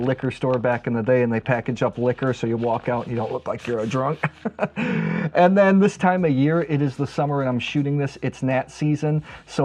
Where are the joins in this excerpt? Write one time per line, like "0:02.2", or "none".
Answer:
none